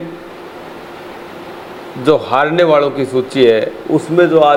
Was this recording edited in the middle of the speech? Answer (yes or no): no